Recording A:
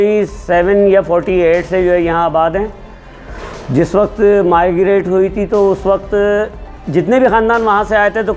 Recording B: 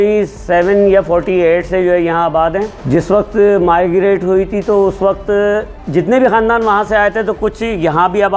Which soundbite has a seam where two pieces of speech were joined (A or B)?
B